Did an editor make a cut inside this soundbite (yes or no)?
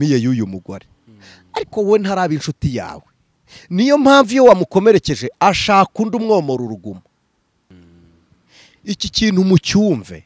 yes